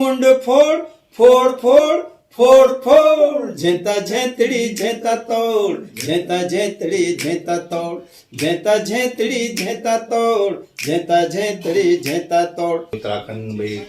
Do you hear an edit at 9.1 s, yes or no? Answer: no